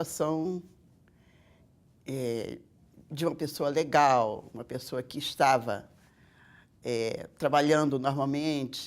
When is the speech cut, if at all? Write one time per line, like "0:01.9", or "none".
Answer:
0:05.1